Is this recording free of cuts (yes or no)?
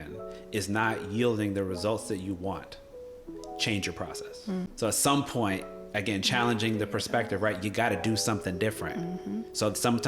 no